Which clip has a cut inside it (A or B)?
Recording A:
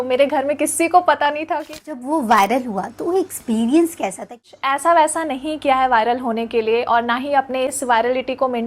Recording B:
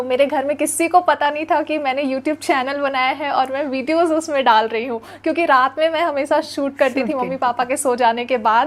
A